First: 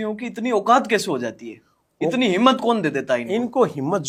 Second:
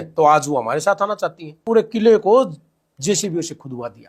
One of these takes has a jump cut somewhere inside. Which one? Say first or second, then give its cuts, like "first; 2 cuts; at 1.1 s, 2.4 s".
second; 1 cut; at 1.6 s